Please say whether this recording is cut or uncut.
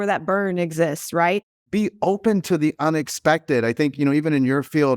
cut